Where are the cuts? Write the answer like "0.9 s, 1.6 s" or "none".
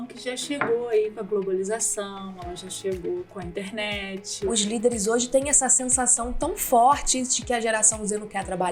4.5 s